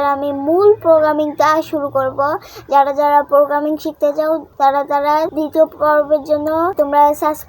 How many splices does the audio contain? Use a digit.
3